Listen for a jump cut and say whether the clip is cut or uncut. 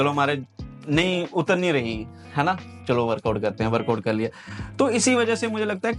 uncut